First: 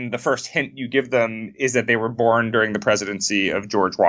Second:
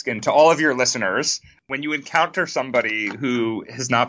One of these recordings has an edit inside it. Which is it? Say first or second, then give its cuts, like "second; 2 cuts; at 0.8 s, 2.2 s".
second; 1 cut; at 1.6 s